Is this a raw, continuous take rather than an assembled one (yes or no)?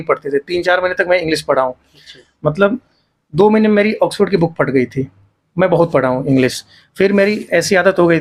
yes